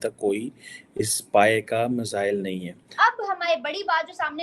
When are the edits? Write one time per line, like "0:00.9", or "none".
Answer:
0:02.9